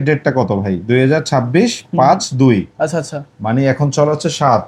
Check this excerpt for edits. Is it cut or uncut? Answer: uncut